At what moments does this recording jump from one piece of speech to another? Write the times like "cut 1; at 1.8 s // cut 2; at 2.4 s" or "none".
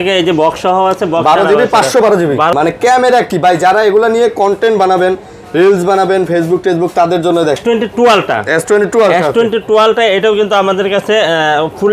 cut 1; at 2.5 s // cut 2; at 7.6 s